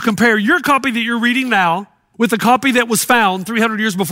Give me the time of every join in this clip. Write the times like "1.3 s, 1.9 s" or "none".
2.0 s